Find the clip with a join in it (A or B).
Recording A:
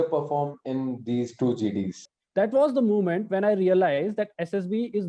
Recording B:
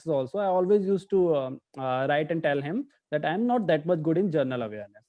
A